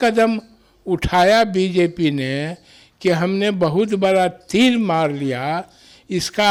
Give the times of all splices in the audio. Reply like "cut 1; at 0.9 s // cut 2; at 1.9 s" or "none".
none

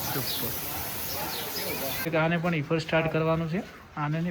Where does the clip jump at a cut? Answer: cut 1; at 2.0 s

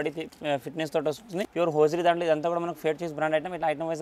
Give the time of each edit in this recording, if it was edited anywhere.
cut 1; at 1.4 s

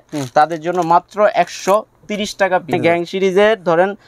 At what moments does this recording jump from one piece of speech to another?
cut 1; at 2.7 s

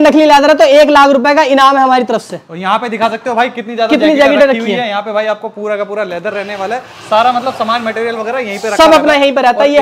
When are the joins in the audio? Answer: none

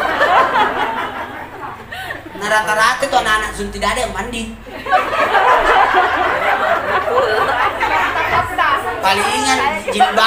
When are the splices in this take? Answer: none

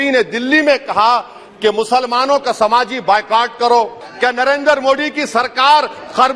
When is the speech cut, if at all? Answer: cut 1; at 4.0 s

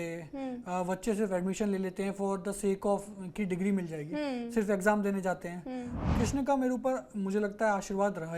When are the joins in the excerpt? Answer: cut 1; at 6.0 s

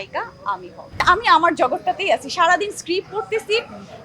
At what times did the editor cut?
cut 1; at 1.0 s

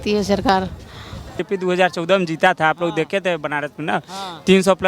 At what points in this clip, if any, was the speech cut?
cut 1; at 1.4 s

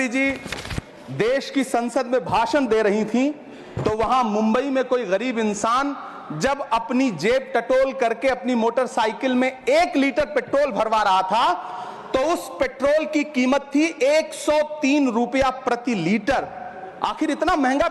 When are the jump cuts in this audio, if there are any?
none

